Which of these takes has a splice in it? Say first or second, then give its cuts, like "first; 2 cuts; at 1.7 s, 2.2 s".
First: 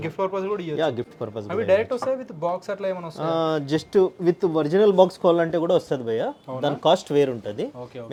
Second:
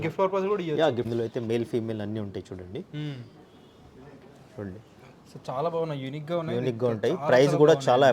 second; 1 cut; at 1.1 s